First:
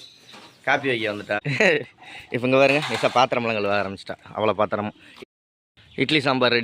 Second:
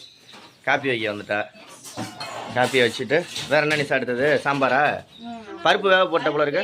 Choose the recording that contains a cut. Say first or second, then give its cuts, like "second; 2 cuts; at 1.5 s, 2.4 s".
first; 2 cuts; at 1.4 s, 5.1 s